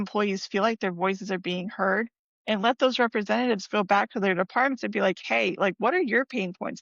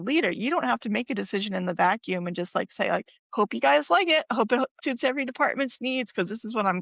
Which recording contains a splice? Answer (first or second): second